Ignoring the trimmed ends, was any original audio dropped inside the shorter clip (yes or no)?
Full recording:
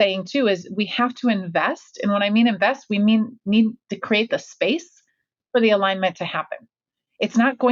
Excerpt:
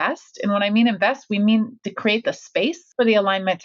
yes